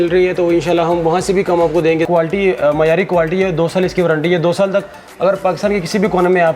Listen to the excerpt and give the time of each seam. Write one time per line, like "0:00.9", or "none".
0:02.1